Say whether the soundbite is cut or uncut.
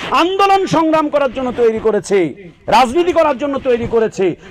uncut